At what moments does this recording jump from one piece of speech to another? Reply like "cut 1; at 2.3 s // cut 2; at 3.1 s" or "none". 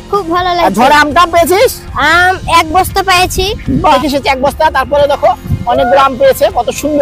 cut 1; at 3.9 s